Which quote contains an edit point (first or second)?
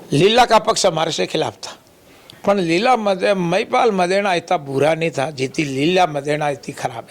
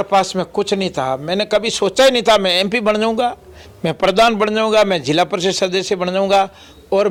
first